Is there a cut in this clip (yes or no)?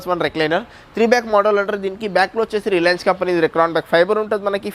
no